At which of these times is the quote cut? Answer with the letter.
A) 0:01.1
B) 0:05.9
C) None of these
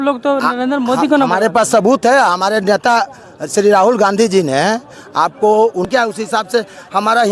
B